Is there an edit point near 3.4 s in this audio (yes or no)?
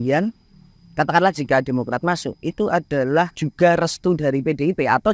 yes